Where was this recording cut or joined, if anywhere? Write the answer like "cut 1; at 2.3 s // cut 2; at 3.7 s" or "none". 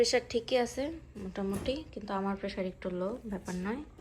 none